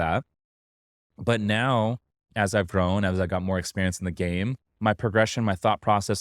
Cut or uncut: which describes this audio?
cut